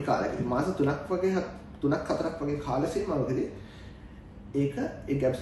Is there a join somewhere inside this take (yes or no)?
no